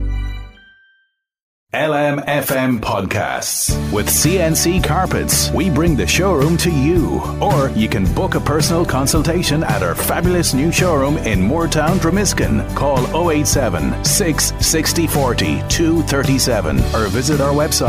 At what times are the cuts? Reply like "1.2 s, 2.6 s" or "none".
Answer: 1.7 s